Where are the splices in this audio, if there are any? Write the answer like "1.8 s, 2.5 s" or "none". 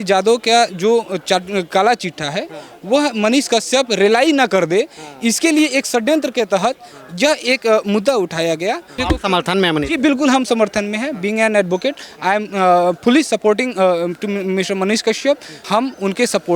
8.9 s, 15.5 s